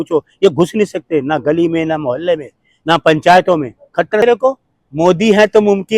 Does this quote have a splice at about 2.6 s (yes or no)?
no